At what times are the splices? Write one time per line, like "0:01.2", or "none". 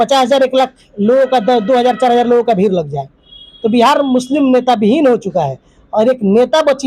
none